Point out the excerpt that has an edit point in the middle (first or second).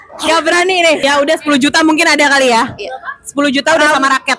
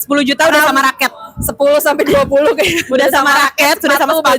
first